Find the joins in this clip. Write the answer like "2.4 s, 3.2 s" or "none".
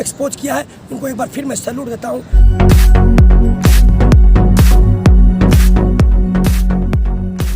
2.3 s